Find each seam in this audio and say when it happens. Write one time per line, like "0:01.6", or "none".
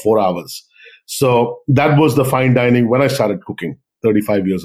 none